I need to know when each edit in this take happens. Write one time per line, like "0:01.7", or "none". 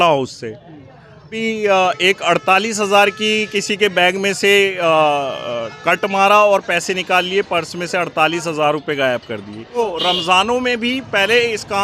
0:01.4
0:09.6